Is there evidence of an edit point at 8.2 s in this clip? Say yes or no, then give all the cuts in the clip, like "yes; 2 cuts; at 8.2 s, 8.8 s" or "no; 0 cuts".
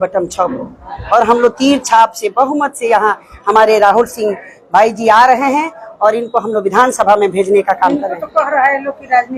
no; 0 cuts